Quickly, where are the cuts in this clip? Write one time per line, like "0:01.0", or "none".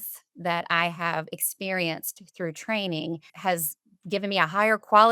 0:03.3